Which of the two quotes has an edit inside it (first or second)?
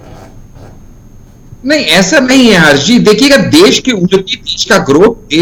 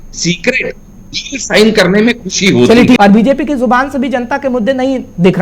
second